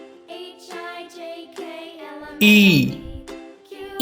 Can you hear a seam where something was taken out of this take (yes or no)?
yes